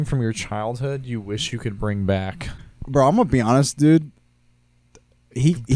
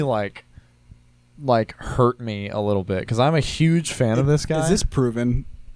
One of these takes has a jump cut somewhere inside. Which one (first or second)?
first